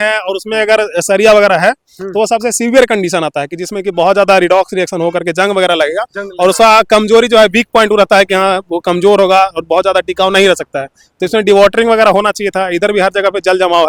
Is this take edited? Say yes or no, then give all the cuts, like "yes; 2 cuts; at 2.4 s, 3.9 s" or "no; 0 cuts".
no; 0 cuts